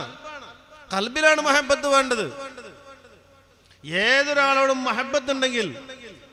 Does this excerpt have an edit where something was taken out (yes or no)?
no